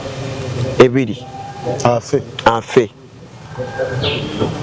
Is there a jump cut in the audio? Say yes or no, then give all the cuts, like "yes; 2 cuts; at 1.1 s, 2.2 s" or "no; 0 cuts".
no; 0 cuts